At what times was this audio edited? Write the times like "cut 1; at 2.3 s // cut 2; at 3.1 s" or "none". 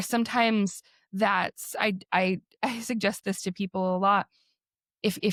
none